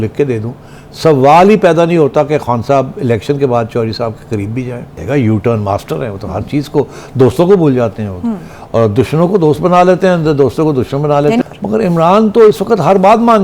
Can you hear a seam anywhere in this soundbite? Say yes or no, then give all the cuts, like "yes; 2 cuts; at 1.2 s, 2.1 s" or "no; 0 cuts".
yes; 2 cuts; at 4.9 s, 11.4 s